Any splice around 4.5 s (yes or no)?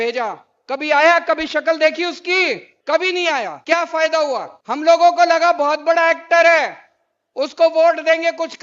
yes